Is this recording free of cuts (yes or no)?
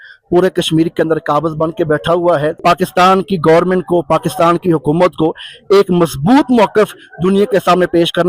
no